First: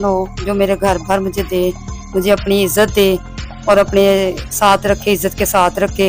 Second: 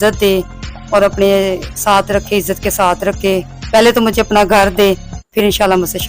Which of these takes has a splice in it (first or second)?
second